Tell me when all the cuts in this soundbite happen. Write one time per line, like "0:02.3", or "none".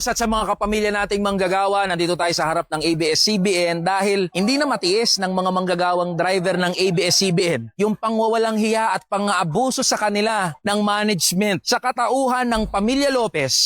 none